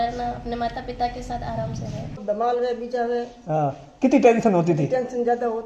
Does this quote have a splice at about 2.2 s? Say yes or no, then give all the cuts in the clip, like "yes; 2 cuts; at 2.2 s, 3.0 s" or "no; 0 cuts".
yes; 1 cut; at 2.2 s